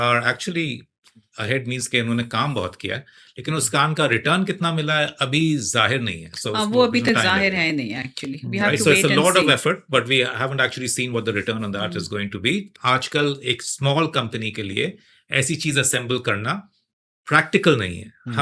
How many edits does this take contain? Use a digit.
1